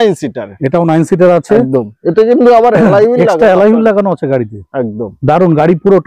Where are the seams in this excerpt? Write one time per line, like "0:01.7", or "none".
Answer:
none

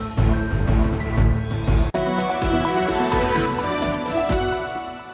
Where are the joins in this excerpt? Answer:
none

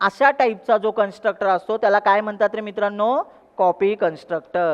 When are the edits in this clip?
none

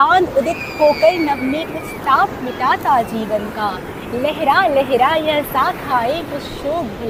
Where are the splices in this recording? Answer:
none

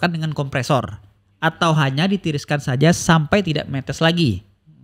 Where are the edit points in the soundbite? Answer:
none

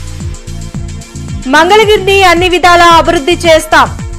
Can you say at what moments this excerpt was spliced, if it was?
none

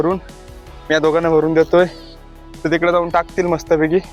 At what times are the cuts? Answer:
none

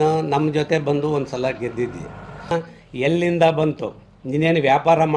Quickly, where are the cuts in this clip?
0:02.5

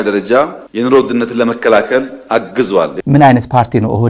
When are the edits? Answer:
0:03.0

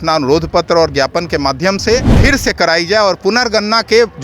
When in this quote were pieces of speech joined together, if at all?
0:02.1

